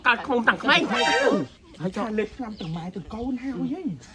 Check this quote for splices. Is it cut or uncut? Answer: cut